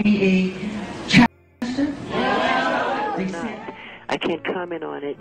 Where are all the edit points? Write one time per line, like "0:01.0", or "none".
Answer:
0:03.4